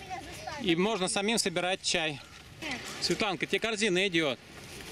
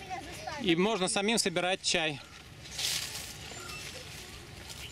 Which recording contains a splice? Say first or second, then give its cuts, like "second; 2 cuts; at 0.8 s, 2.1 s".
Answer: first; 1 cut; at 2.6 s